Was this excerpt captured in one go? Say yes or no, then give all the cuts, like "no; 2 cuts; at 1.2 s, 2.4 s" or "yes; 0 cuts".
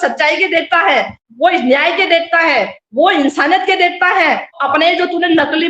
no; 1 cut; at 4.6 s